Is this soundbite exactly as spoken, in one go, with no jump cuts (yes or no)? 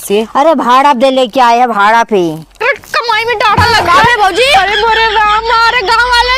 no